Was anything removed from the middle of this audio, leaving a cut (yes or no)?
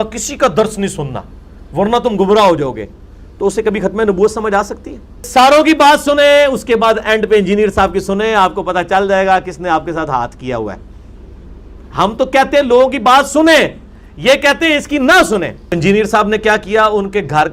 yes